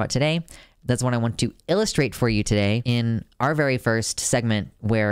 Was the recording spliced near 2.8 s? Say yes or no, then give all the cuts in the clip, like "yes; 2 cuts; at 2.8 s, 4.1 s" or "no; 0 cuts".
yes; 1 cut; at 2.8 s